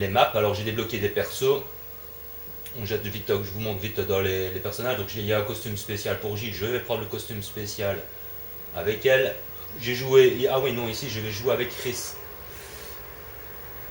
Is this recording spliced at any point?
no; 0 cuts

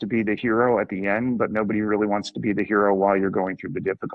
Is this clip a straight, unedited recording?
yes; 0 cuts

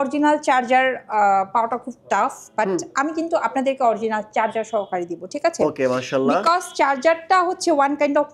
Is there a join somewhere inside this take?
no; 0 cuts

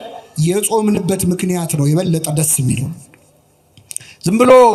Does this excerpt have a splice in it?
no; 0 cuts

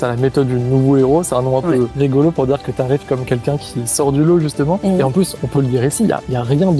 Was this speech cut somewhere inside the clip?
yes; 2 cuts; at 1.9 s, 4.8 s

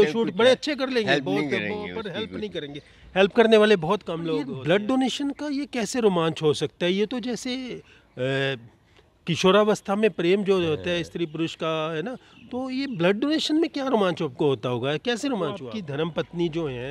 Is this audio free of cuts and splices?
no; 2 cuts; at 4.5 s, 15.7 s

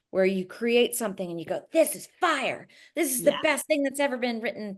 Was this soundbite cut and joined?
no; 0 cuts

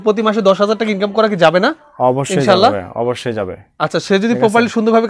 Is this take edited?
no; 0 cuts

